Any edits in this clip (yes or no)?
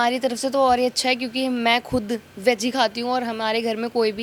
no